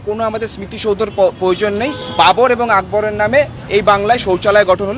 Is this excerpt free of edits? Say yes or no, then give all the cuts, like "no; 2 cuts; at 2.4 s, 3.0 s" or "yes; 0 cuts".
no; 2 cuts; at 2.0 s, 3.6 s